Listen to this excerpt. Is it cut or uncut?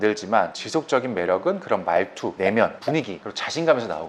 uncut